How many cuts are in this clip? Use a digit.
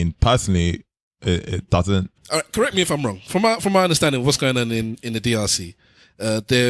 1